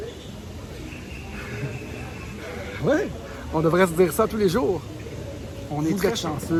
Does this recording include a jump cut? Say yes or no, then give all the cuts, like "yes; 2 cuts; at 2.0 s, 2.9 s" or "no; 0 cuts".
no; 0 cuts